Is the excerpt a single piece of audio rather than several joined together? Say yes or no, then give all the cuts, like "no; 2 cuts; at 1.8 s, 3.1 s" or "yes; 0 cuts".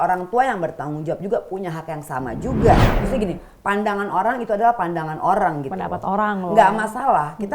no; 1 cut; at 2.9 s